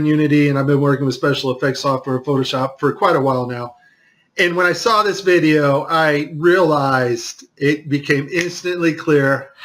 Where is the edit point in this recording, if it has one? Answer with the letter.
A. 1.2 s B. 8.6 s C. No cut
B